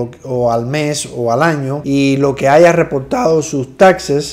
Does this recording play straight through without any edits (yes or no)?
yes